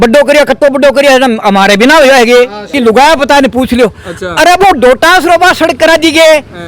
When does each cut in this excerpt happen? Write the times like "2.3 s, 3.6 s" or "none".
2.7 s